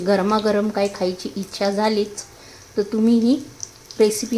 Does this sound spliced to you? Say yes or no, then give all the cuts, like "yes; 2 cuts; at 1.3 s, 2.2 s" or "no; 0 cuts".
no; 0 cuts